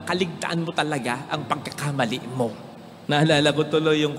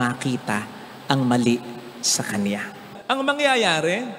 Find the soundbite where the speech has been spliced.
second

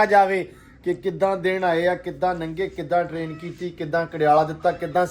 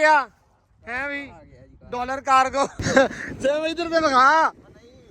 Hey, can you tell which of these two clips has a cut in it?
second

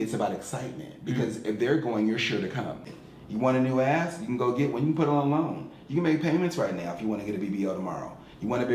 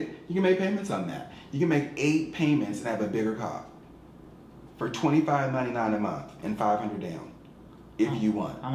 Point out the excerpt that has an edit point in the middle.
first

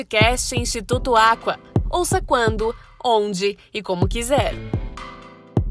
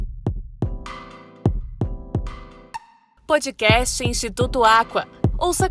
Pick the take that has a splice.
second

